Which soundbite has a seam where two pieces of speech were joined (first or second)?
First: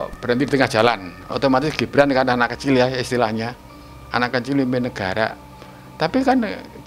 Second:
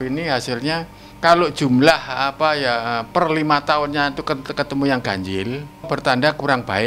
second